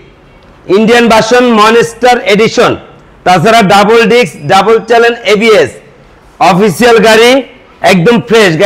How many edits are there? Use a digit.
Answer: 0